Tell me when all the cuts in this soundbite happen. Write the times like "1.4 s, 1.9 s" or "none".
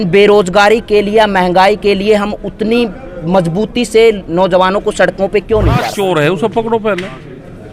5.9 s